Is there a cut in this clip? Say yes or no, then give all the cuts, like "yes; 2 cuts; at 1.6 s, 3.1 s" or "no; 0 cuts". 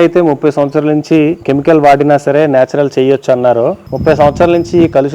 yes; 2 cuts; at 1.4 s, 3.9 s